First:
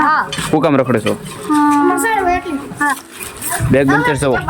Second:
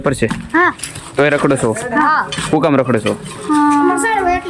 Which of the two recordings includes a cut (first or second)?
first